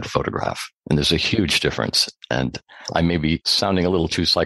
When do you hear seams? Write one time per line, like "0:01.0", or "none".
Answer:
0:03.5

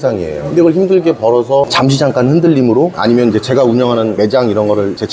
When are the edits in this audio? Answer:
none

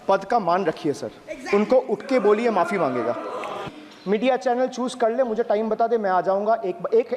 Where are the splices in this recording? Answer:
0:03.6

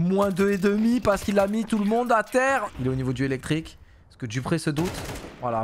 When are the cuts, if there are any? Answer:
0:02.6

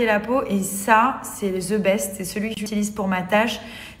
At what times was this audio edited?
0:02.7

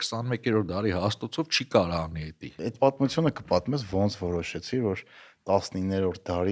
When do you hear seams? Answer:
0:02.6

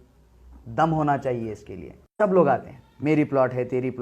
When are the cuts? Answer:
0:02.2

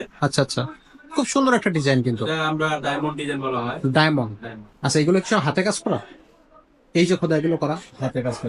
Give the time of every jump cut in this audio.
none

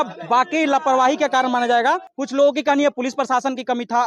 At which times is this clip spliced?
0:02.1

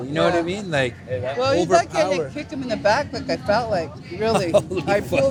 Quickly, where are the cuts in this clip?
none

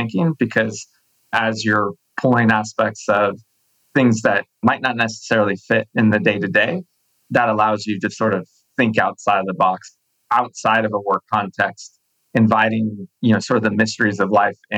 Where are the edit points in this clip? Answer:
0:10.1
0:13.0

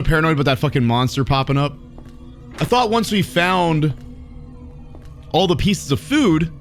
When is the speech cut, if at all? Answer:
none

